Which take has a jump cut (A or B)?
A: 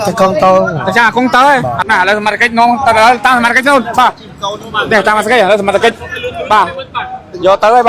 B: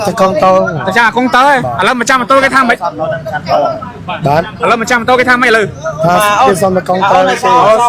A